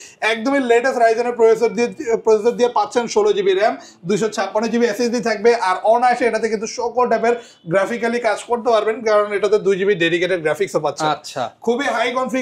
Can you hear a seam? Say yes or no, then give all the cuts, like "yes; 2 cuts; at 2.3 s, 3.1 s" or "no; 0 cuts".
no; 0 cuts